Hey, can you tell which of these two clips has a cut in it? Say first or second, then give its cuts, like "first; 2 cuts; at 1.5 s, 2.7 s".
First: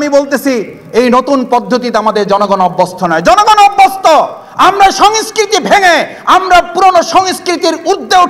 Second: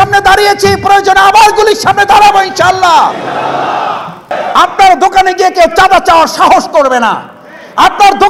second; 1 cut; at 4.3 s